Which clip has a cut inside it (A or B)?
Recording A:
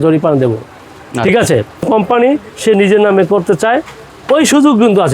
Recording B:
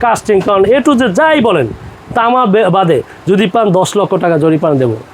A